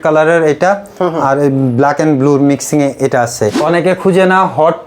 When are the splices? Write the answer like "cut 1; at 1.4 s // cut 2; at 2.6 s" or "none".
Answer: cut 1; at 3.6 s